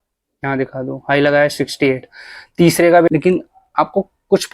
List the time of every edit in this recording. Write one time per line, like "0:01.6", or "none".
0:03.1